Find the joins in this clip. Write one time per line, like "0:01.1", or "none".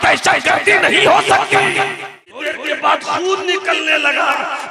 0:02.6